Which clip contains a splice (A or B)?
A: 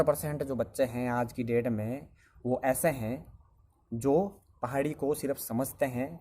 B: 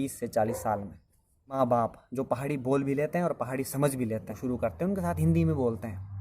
B